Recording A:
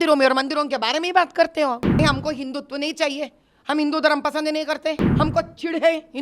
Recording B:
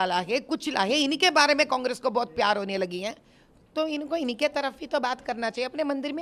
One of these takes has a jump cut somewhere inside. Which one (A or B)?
A